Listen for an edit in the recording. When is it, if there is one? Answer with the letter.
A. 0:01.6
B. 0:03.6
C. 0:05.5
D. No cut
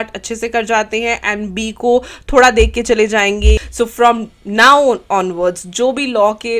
B